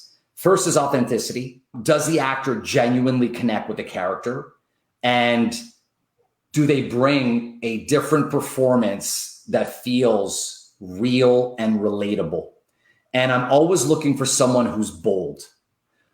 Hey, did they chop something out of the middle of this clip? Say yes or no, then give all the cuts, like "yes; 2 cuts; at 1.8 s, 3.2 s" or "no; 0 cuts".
yes; 1 cut; at 1.7 s